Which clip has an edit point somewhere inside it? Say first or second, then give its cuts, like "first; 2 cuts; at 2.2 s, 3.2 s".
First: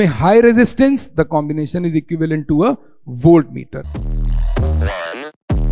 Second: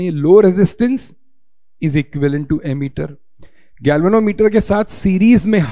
first; 1 cut; at 3.9 s